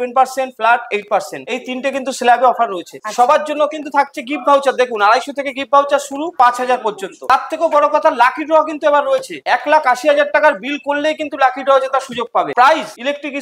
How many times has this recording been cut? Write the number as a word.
zero